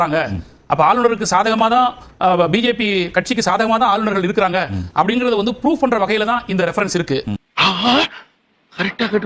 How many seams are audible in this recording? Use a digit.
1